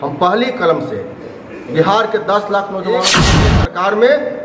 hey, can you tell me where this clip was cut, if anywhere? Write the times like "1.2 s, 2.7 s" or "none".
3.4 s

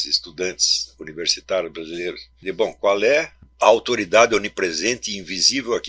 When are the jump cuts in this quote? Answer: 2.3 s, 3.4 s

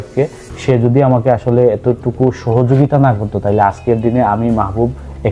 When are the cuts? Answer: none

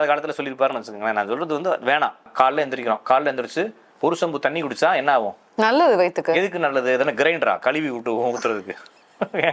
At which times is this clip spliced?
2.3 s

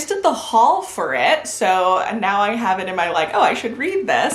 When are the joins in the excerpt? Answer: none

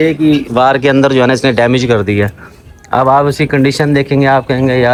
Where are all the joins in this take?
none

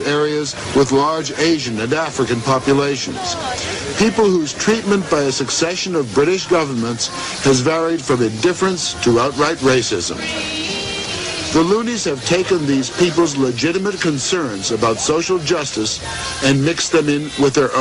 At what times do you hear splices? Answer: none

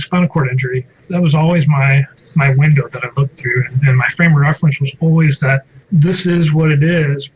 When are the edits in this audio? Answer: 0.9 s, 5.7 s

